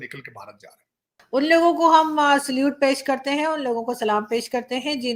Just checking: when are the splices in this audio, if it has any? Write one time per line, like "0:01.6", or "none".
0:01.2